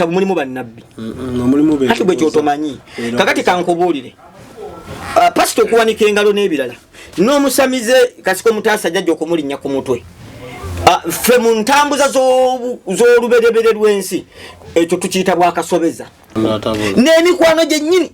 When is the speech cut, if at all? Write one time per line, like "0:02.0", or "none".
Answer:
0:16.3